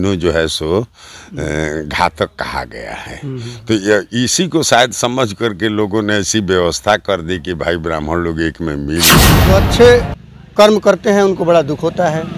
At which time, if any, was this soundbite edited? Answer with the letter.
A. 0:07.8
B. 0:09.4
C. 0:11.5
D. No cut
B